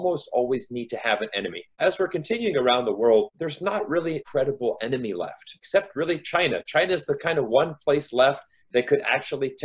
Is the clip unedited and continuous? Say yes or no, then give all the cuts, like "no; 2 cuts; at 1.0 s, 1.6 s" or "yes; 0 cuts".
no; 1 cut; at 1.8 s